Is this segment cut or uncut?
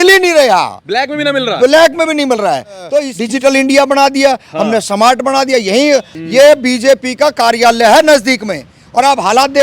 cut